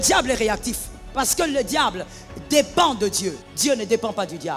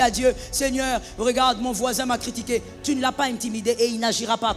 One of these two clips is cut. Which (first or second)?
first